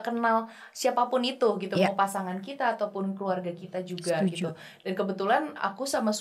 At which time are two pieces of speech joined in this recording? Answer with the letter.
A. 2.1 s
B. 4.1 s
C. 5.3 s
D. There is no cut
D